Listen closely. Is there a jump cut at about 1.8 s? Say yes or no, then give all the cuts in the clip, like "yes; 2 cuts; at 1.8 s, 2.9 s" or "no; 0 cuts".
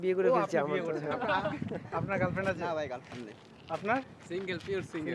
yes; 1 cut; at 1.8 s